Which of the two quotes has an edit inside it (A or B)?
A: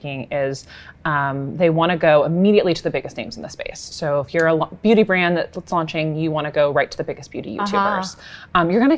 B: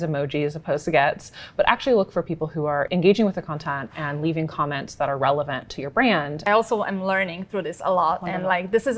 B